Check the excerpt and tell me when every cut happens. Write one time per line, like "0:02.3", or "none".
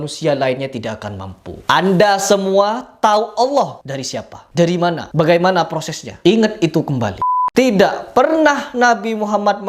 0:07.1

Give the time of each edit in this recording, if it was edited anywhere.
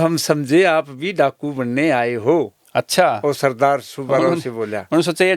none

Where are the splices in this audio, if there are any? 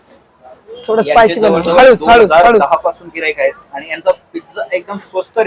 none

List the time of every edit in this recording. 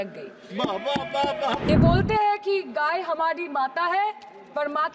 0:01.7

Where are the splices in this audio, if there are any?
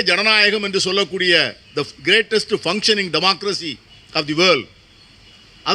none

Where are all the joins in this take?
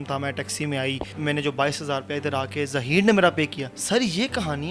0:01.1
0:03.7

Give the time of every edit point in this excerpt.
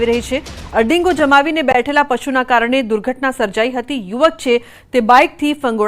none

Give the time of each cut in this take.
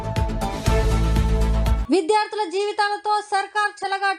0:01.8

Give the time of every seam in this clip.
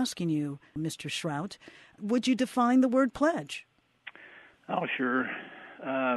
0:02.7

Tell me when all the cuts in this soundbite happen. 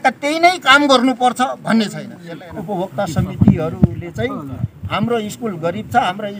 0:02.2

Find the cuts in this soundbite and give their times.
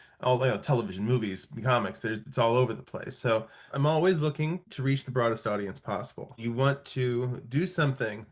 0:03.7
0:06.4

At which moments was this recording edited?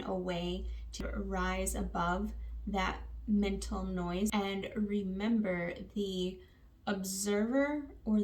0:01.0
0:04.3

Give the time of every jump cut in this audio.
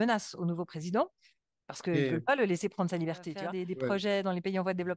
0:03.4

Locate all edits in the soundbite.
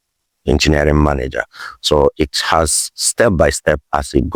none

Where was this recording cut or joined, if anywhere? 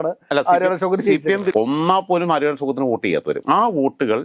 0:01.5
0:03.4

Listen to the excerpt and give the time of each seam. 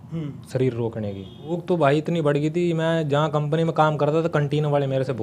0:01.6

